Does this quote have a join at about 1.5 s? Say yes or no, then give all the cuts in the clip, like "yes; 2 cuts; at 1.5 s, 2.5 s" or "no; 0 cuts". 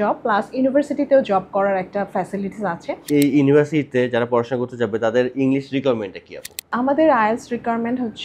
no; 2 cuts; at 3.1 s, 6.7 s